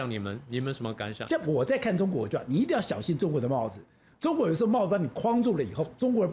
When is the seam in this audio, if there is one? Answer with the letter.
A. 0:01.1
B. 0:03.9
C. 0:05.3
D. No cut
A